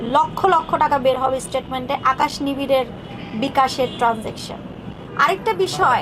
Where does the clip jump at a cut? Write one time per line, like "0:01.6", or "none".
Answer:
0:05.1